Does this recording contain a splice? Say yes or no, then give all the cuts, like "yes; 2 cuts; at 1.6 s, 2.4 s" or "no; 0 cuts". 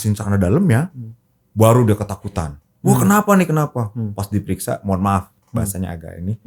no; 0 cuts